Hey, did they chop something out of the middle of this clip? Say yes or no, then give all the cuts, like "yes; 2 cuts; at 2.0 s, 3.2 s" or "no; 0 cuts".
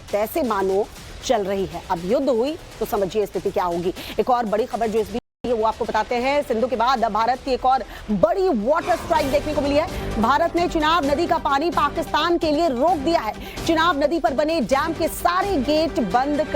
yes; 1 cut; at 6.1 s